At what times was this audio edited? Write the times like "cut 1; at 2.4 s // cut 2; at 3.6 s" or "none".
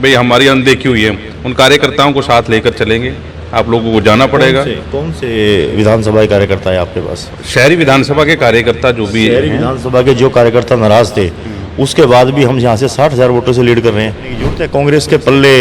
cut 1; at 14.6 s